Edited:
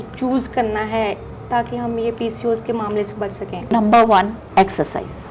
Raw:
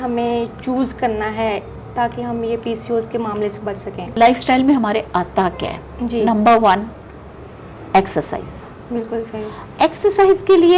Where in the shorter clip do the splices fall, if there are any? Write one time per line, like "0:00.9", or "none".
0:03.7
0:04.4